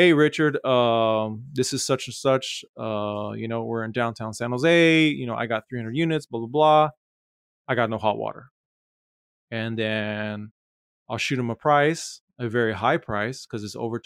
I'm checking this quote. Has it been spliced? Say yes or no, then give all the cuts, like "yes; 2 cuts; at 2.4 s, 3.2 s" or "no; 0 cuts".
no; 0 cuts